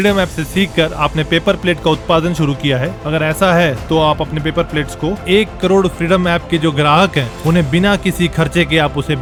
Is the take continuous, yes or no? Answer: yes